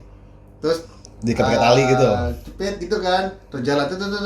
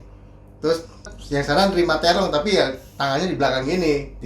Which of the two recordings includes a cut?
second; 1 cut; at 1.1 s

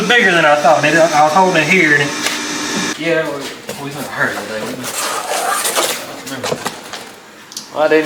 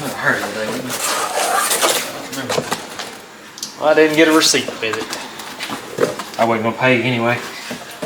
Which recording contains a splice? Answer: first; 1 cut; at 2.9 s

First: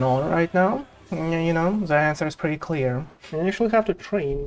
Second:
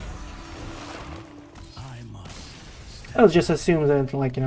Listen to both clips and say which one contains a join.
first; 1 cut; at 3.1 s

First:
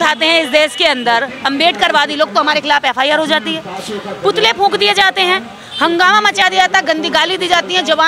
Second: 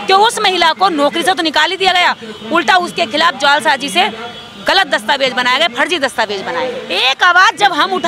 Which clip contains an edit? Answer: second; 1 cut; at 6.9 s

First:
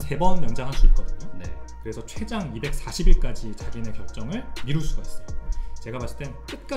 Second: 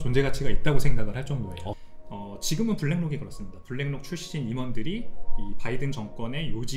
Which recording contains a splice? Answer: second; 1 cut; at 1.8 s

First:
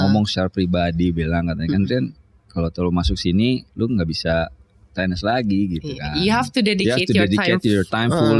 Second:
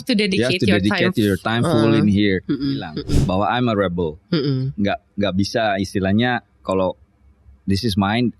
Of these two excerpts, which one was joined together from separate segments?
second; 1 cut; at 3.0 s

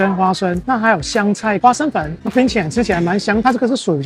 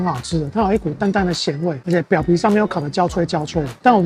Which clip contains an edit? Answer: first; 1 cut; at 2.2 s

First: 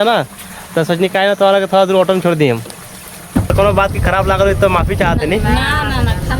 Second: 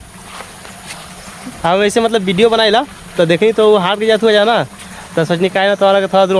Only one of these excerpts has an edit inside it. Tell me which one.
first; 1 cut; at 3.5 s

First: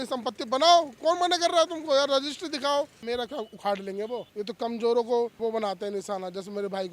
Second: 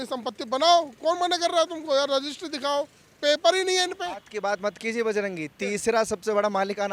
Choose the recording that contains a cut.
first; 3 cuts; at 3.0 s, 4.3 s, 5.4 s

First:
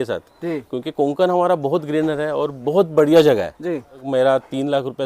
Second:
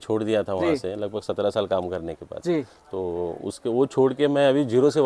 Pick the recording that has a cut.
first; 1 cut; at 4.0 s

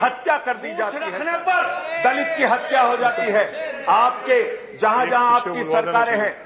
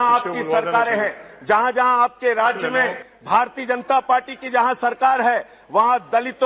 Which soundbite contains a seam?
first; 1 cut; at 1.1 s

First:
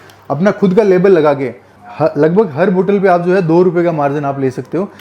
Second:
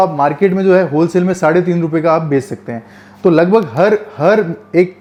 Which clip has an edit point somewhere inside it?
first; 1 cut; at 1.7 s

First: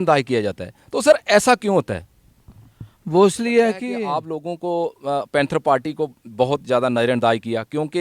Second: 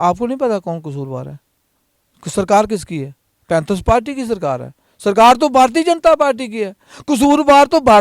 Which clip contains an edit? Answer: first; 1 cut; at 4.0 s

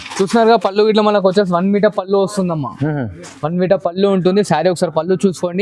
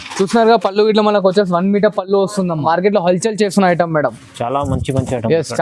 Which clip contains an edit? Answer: second; 1 cut; at 2.6 s

